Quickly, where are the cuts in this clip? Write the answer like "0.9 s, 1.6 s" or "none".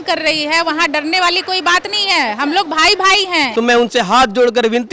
3.5 s